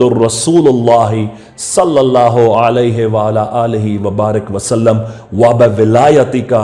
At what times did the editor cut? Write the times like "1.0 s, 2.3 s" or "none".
none